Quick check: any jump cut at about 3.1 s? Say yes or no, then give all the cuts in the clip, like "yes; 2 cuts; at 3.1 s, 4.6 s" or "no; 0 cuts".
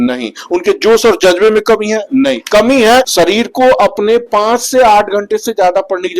yes; 1 cut; at 3.1 s